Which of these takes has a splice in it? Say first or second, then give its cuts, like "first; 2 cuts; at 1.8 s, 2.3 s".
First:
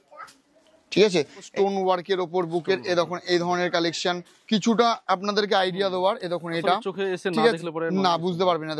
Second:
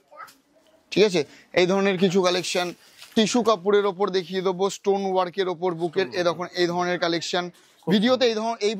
first; 2 cuts; at 1.5 s, 4.3 s